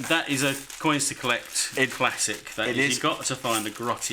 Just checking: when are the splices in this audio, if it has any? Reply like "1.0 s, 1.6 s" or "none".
none